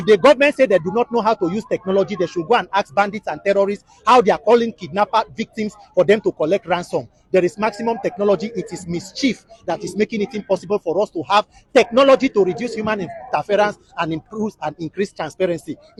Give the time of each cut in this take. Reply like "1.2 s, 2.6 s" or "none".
none